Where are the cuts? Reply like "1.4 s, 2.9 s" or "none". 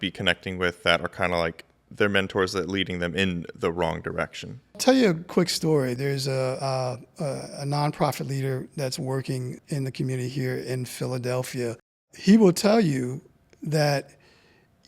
4.7 s, 6.0 s, 9.6 s, 12.1 s